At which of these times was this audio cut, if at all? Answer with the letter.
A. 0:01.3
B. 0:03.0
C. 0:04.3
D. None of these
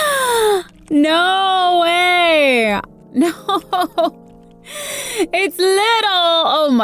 B